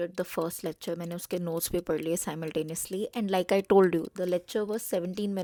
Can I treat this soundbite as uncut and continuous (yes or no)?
yes